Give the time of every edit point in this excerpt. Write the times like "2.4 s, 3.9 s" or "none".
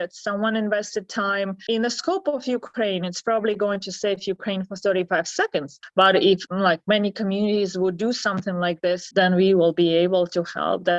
1.6 s, 6.5 s, 9.1 s